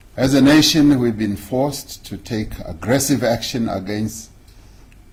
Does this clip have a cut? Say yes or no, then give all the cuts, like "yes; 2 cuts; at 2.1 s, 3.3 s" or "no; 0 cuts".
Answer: no; 0 cuts